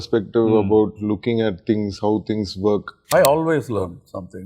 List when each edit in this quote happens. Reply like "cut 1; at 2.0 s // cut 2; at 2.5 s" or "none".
cut 1; at 3.0 s